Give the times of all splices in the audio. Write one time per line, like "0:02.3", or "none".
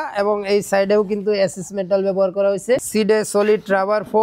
0:02.8

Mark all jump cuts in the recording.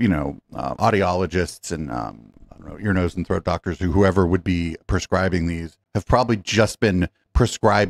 none

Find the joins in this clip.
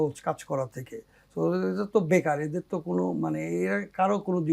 none

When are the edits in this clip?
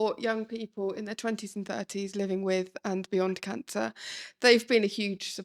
none

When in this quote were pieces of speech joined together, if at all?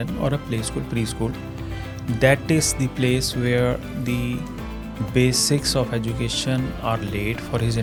none

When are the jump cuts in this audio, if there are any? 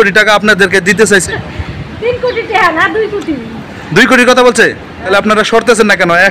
0:01.2
0:05.1

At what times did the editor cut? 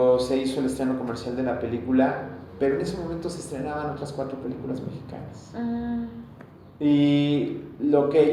none

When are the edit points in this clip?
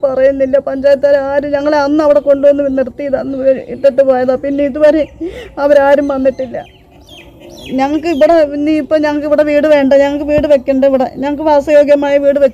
0:06.6

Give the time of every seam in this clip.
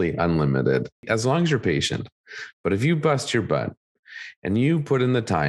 0:01.0

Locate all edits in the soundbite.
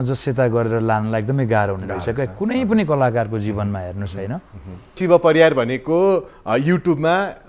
0:05.0

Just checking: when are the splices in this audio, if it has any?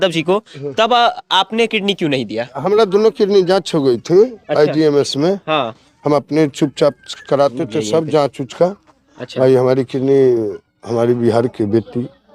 none

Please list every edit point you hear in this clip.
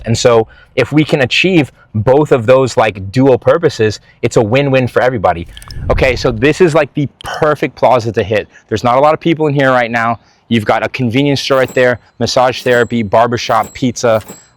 0:05.5

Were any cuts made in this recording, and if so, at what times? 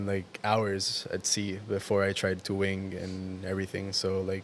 none

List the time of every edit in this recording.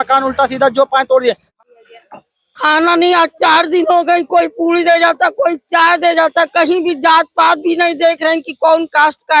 0:01.5

